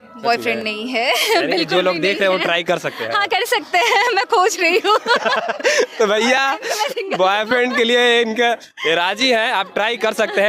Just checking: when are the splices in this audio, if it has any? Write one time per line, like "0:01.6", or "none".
none